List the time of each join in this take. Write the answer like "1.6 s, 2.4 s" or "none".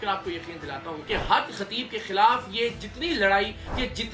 0.9 s